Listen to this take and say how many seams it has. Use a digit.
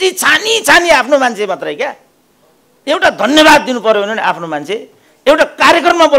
0